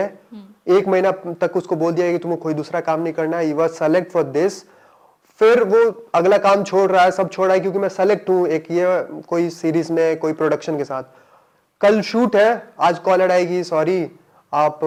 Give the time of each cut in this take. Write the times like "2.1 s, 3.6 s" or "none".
none